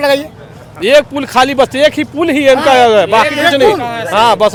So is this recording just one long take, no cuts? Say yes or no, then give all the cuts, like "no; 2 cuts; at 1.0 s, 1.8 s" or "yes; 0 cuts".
yes; 0 cuts